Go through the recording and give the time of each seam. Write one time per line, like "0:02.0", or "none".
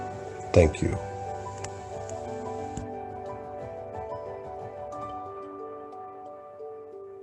none